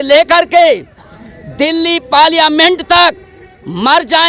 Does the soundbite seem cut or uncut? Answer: uncut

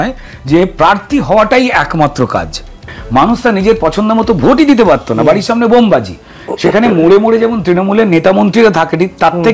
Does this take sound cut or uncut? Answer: cut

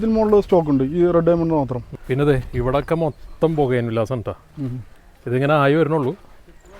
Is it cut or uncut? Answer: cut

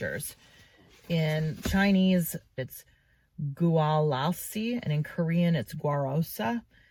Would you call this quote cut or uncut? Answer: uncut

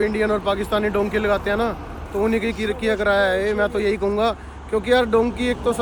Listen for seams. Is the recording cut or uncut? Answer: uncut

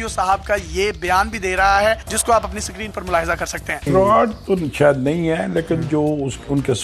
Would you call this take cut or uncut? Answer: uncut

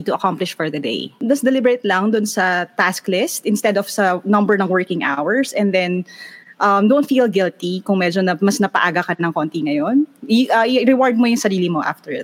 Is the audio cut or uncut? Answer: cut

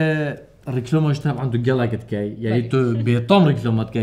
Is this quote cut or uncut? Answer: uncut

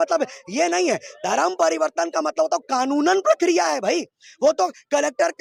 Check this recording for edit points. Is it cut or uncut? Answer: uncut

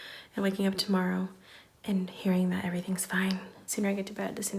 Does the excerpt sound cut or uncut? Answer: cut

